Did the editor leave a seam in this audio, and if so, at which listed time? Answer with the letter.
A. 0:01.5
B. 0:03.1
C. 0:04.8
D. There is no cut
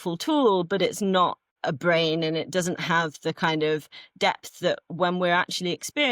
A